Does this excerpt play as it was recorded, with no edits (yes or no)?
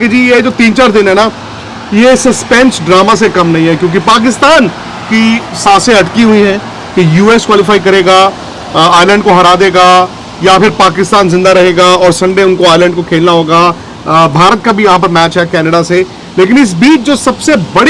yes